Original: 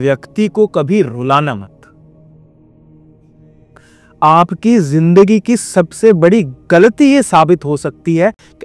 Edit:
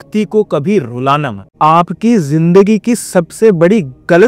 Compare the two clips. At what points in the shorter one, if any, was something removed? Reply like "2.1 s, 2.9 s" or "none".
1.4 s